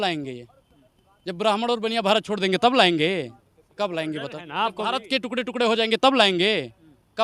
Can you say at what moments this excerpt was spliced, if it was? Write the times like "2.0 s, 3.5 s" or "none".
none